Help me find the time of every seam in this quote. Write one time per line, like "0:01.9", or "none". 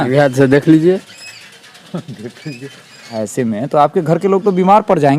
0:03.2

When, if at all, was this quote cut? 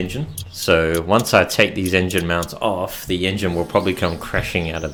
none

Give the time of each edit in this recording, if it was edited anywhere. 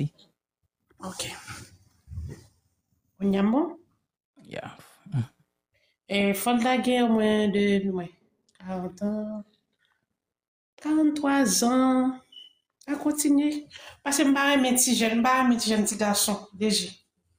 0:01.3

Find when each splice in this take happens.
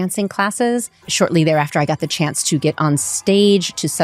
0:01.1

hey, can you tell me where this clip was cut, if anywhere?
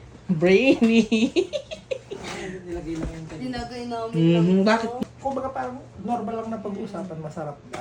0:05.0

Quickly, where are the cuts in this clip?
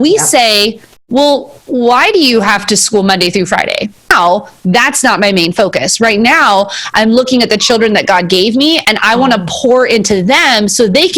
0:04.1

